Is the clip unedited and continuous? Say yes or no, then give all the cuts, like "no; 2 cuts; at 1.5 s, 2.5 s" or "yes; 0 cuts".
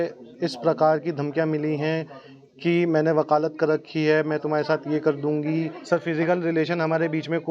no; 1 cut; at 5.8 s